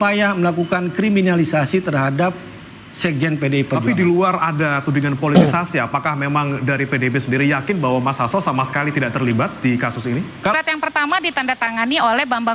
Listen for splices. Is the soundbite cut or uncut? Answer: cut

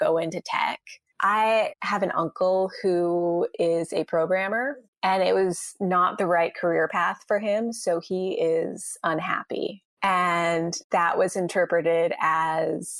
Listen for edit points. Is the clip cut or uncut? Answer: cut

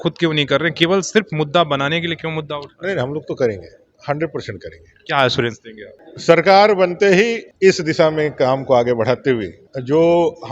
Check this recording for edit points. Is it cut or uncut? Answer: uncut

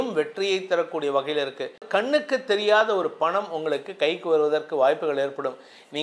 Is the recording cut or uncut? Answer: cut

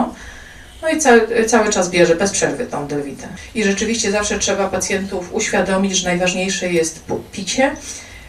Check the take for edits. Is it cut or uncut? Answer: cut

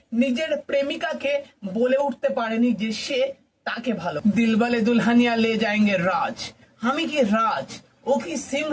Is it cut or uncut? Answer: cut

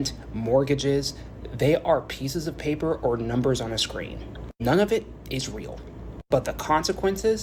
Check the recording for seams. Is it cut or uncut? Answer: uncut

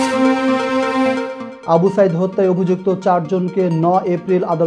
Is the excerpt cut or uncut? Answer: cut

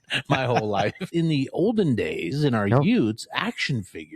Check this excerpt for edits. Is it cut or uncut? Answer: cut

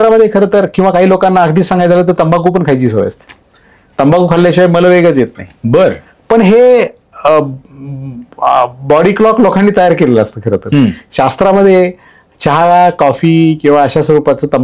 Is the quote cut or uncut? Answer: uncut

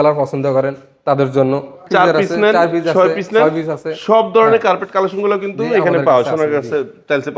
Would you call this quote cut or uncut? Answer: cut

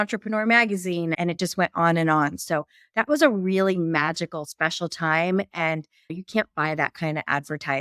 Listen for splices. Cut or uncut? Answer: uncut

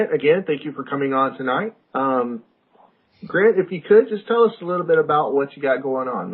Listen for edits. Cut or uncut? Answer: cut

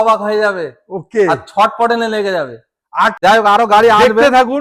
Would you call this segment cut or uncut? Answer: cut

